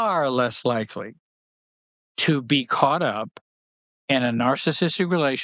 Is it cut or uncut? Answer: uncut